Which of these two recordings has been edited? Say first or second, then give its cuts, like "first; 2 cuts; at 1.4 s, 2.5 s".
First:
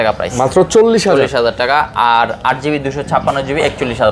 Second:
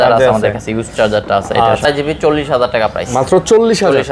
second; 1 cut; at 1.8 s